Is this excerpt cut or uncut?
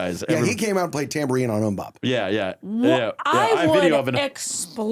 uncut